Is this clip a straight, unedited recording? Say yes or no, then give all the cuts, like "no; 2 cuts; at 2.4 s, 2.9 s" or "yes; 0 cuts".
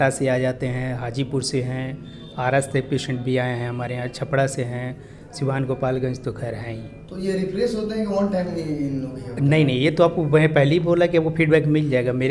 yes; 0 cuts